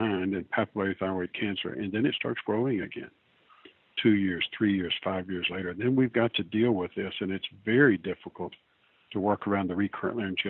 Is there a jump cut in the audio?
no; 0 cuts

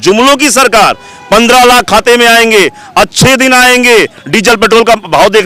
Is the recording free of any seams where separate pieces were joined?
yes; 0 cuts

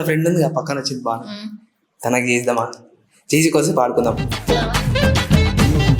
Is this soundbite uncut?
yes; 0 cuts

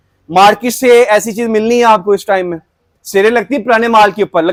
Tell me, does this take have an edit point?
no; 0 cuts

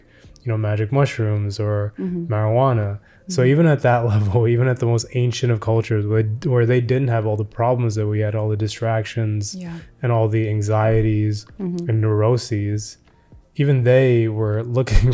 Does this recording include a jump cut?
no; 0 cuts

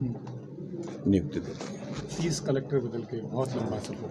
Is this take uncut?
yes; 0 cuts

